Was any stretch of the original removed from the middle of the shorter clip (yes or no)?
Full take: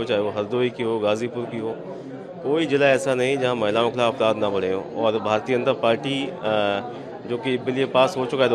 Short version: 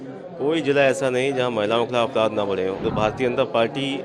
yes